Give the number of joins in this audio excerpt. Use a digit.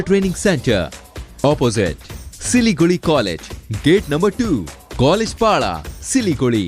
0